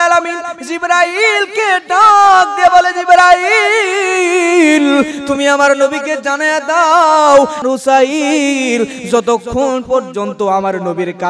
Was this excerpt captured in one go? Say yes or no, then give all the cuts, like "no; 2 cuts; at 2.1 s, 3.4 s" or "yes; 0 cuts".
no; 1 cut; at 7.6 s